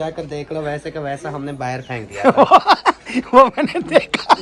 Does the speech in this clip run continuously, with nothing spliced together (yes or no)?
yes